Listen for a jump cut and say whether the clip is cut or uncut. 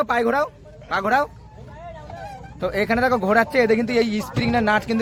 uncut